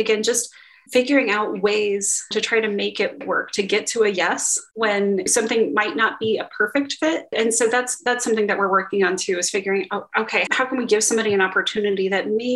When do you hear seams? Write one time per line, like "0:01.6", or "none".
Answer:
0:02.3